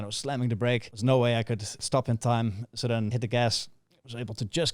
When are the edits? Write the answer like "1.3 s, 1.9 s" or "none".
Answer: 0.9 s, 1.7 s, 3.1 s